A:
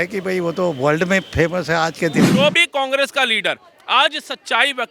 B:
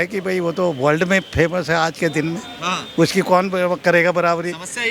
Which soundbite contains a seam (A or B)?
A